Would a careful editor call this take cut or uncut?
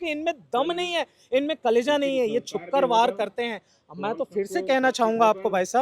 uncut